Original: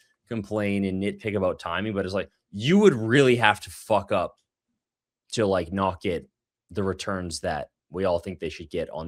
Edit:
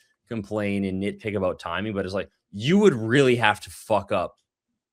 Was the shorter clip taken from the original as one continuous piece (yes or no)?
yes